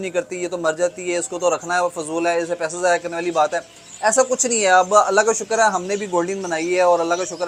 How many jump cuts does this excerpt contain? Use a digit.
0